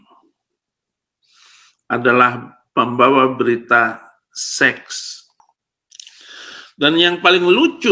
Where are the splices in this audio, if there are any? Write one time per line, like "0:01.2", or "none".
0:05.2

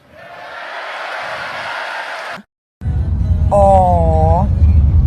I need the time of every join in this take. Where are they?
0:02.5

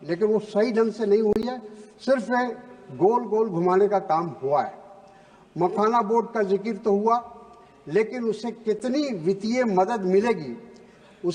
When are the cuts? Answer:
none

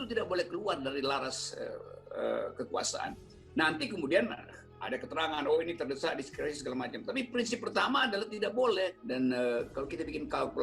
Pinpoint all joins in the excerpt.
0:09.0

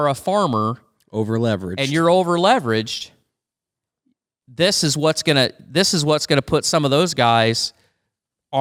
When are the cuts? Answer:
none

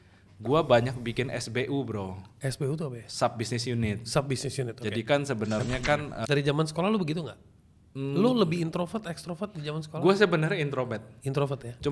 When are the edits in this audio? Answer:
0:06.1

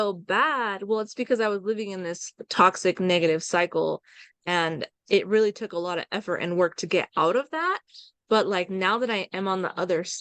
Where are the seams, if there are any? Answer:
none

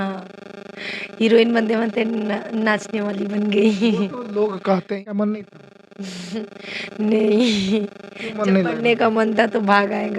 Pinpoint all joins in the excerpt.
0:05.0

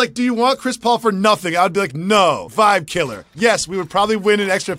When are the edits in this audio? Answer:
0:02.5

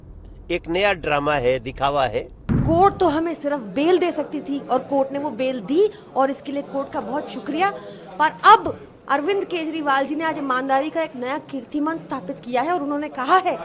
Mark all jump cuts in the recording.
0:02.6

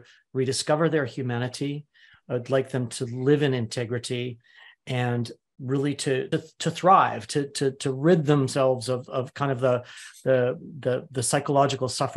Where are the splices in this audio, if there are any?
0:06.3

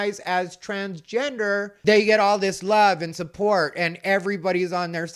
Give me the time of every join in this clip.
none

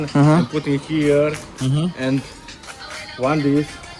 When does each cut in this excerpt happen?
none

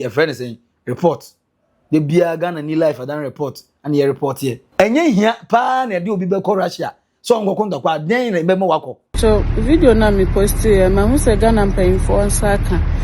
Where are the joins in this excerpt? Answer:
0:04.6
0:09.2

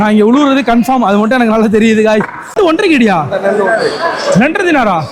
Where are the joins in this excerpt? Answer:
0:02.5

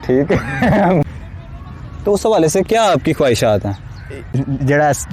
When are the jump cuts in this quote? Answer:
0:01.0
0:04.0

